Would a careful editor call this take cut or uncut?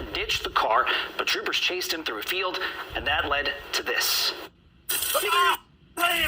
cut